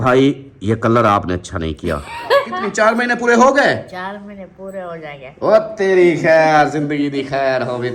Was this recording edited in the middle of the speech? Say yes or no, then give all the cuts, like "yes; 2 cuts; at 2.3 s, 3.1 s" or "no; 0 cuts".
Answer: yes; 1 cut; at 2.6 s